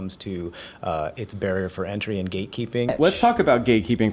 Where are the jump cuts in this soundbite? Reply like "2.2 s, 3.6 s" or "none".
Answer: 2.9 s